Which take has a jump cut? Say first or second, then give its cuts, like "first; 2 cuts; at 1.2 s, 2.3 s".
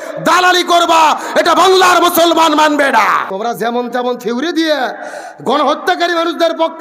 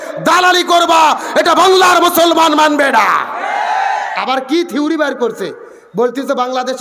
first; 1 cut; at 3.3 s